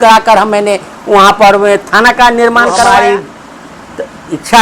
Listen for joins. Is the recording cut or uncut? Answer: cut